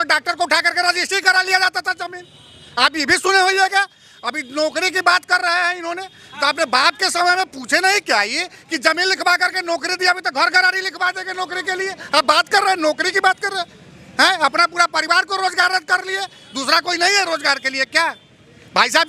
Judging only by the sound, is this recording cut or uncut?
uncut